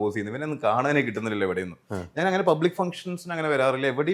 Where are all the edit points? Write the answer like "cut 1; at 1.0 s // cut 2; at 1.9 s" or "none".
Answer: none